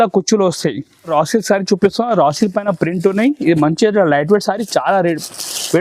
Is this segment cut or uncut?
cut